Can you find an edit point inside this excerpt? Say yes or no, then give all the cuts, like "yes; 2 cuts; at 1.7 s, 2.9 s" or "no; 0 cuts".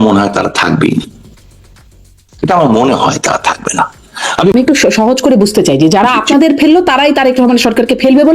yes; 1 cut; at 4.5 s